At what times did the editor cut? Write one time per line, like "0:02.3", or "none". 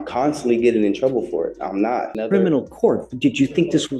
0:02.1